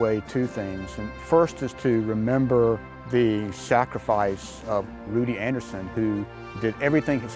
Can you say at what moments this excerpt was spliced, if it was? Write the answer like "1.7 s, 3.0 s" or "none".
2.9 s, 4.9 s, 6.4 s